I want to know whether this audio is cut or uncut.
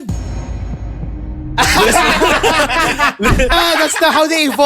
cut